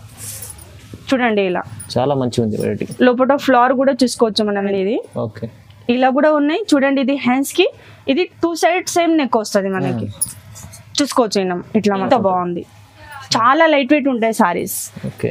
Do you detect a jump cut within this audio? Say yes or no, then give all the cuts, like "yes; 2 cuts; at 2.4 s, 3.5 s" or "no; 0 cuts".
yes; 2 cuts; at 4.7 s, 12.1 s